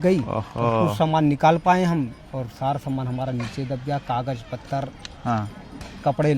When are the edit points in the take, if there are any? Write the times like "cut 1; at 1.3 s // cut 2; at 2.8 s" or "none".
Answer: none